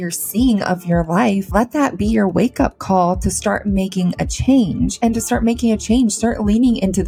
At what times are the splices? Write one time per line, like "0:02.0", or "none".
none